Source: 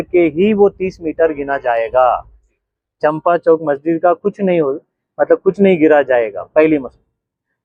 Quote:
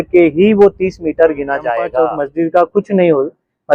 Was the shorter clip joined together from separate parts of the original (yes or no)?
yes